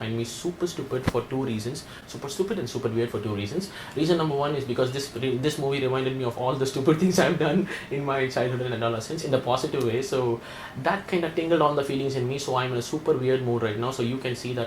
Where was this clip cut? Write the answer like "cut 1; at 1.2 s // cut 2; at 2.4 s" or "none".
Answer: none